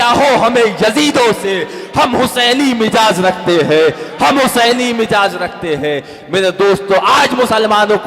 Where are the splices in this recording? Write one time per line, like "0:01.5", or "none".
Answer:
none